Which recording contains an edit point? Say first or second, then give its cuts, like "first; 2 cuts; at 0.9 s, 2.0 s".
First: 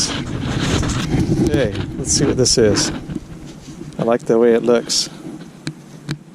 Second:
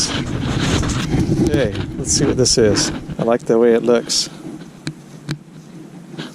second; 1 cut; at 3.0 s